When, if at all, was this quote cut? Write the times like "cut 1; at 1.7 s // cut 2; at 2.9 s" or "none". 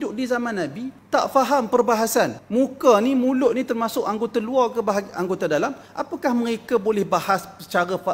cut 1; at 0.9 s // cut 2; at 2.4 s // cut 3; at 5.9 s

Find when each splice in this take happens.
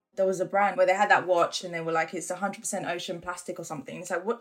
cut 1; at 0.7 s // cut 2; at 1.6 s

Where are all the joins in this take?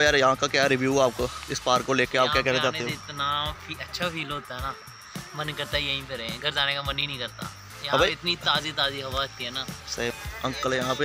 cut 1; at 10.1 s

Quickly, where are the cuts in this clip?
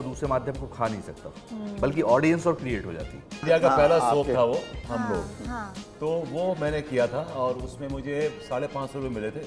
cut 1; at 3.4 s // cut 2; at 5.8 s

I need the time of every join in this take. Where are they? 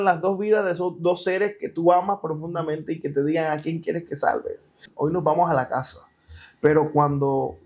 cut 1; at 4.8 s

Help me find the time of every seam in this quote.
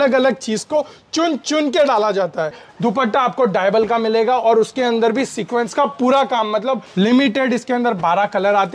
cut 1; at 2.7 s // cut 2; at 6.9 s

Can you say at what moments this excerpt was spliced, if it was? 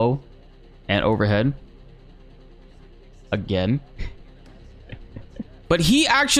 cut 1; at 1.6 s // cut 2; at 3.3 s // cut 3; at 5.6 s

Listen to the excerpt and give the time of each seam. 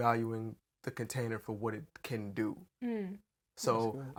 none

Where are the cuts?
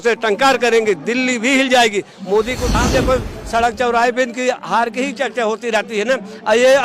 cut 1; at 2.8 s

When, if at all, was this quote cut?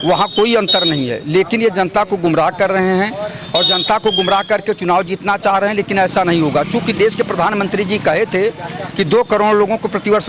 none

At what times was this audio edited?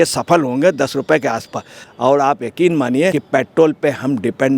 cut 1; at 1.9 s // cut 2; at 3.2 s

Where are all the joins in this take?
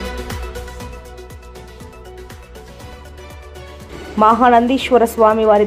cut 1; at 1.3 s // cut 2; at 2.7 s

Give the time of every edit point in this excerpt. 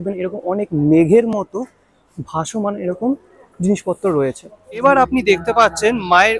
cut 1; at 4.8 s

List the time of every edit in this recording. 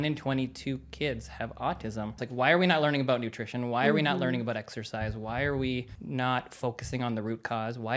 cut 1; at 2.2 s // cut 2; at 6.0 s

